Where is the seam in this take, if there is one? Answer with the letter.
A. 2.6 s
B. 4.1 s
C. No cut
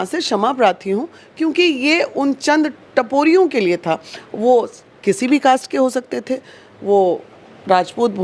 C